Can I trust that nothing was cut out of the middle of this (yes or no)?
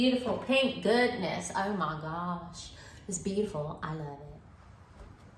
no